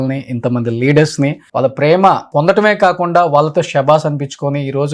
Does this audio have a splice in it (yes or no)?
yes